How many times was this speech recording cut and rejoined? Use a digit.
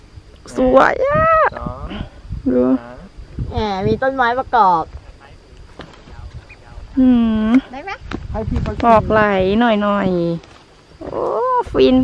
0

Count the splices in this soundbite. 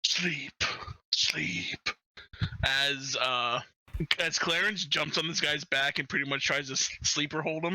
1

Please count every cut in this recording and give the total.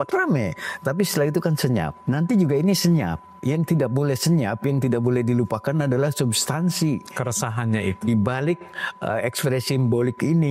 1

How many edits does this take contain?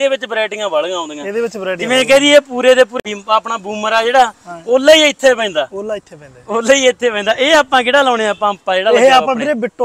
1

